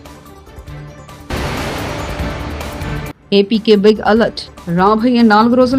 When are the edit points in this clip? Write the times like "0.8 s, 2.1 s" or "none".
1.3 s, 2.8 s